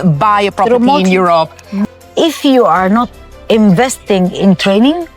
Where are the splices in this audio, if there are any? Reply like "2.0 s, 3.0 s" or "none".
1.8 s